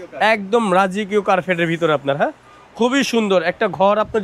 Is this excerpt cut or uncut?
uncut